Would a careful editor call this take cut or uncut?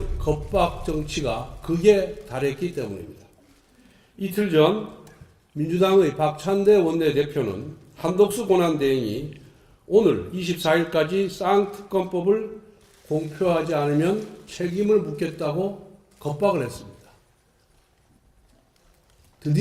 uncut